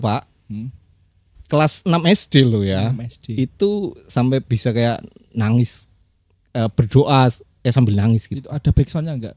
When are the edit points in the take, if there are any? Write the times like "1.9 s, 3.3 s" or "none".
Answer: none